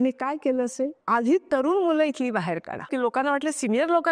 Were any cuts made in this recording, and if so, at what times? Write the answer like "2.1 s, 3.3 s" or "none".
1.0 s, 2.9 s